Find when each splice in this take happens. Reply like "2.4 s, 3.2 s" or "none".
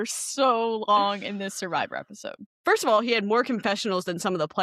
2.4 s